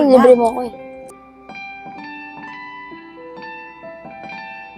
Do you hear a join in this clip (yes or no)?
yes